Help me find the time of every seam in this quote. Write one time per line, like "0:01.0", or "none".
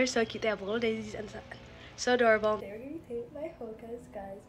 0:02.7